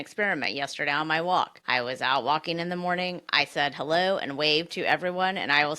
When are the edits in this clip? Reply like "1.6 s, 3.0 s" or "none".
1.6 s